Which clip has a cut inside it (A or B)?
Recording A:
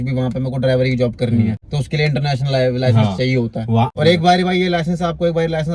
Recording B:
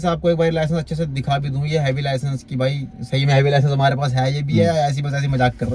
A